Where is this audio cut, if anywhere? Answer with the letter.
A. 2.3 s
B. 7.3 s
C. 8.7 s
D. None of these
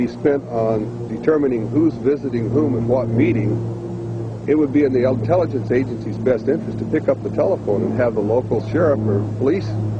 C